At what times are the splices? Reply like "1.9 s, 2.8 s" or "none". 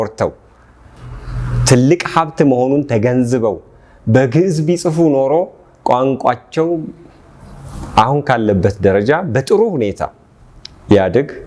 none